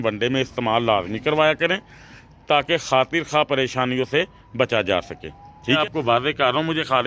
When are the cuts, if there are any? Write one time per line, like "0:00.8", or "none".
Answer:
0:05.8